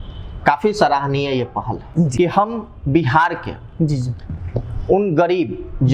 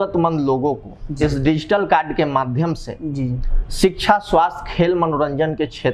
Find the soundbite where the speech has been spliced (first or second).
first